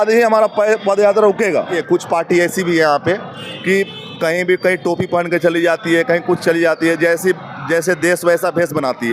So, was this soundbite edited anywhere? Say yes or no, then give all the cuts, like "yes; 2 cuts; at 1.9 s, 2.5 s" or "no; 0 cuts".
yes; 1 cut; at 1.8 s